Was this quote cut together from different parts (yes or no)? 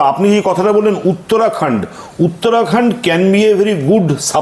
no